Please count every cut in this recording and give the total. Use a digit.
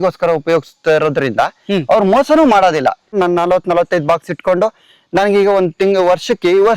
1